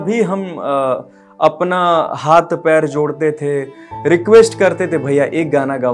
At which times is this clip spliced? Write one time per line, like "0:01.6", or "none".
none